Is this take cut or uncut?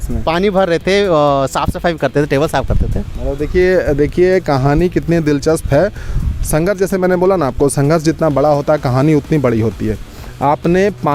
uncut